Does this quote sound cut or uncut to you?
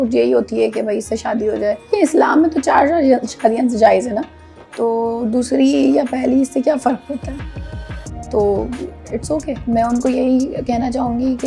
cut